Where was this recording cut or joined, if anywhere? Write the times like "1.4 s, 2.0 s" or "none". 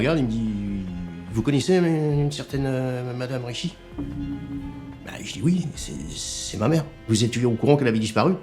1.3 s, 7.0 s